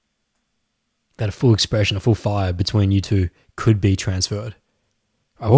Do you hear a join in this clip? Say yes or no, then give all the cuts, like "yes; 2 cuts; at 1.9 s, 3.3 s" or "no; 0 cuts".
no; 0 cuts